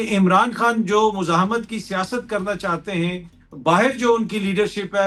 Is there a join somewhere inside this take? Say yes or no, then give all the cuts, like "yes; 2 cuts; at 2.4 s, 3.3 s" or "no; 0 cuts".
no; 0 cuts